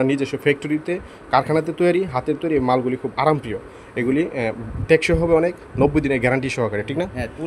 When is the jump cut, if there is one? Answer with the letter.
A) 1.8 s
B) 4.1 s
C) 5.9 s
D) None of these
D